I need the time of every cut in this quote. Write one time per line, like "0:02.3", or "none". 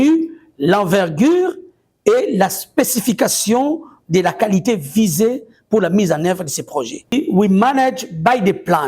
0:07.1